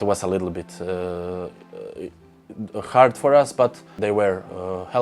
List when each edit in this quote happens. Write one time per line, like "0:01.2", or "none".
0:04.0

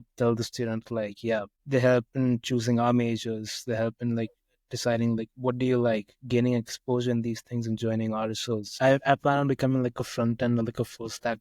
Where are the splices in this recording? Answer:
0:01.6
0:08.7

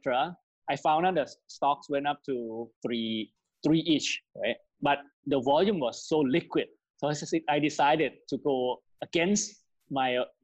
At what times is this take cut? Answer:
none

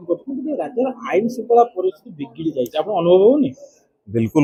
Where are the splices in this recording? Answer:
none

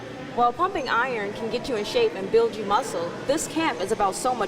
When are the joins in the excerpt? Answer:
none

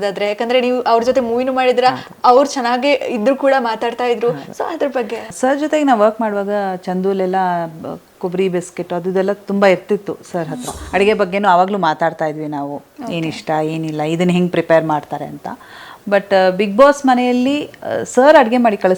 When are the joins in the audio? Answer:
0:05.3
0:10.8

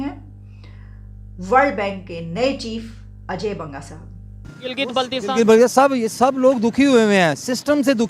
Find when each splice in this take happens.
0:04.6

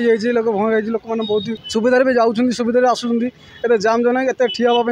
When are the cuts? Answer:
0:01.6

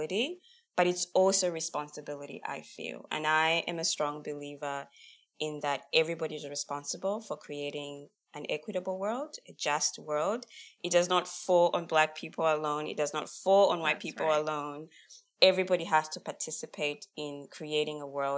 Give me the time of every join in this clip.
0:16.1

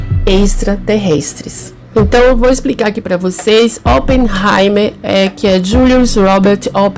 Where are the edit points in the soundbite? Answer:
none

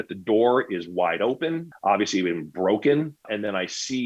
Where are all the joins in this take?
0:01.7
0:03.3

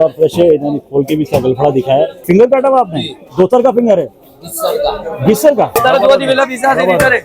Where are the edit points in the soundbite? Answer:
0:02.3
0:05.8

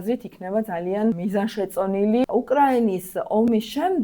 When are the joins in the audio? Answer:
0:01.2
0:02.3

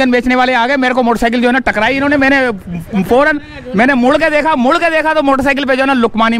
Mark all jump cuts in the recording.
none

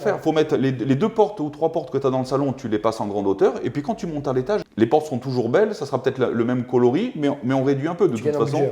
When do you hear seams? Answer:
0:04.7

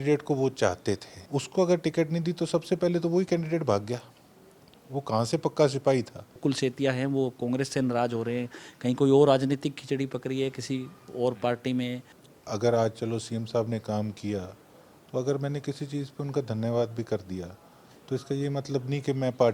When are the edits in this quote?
0:01.1
0:06.4
0:12.1

